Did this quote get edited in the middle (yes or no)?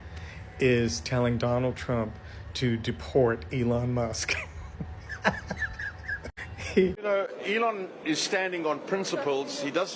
yes